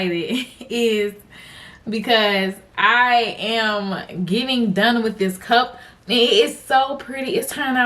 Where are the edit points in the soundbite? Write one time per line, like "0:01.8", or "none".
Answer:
none